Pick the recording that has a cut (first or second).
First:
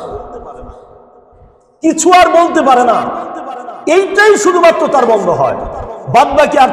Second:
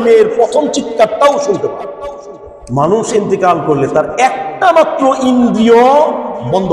second